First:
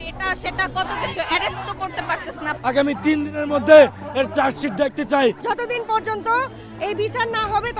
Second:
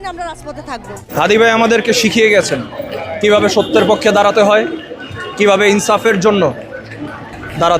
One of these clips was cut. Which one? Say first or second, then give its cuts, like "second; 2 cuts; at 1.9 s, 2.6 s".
second; 1 cut; at 1.1 s